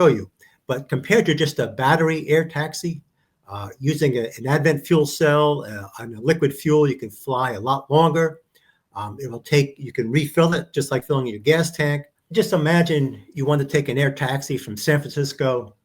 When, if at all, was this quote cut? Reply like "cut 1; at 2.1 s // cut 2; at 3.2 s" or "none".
cut 1; at 12.1 s